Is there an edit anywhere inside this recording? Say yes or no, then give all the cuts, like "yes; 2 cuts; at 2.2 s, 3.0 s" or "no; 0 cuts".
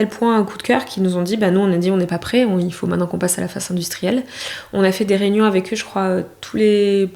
no; 0 cuts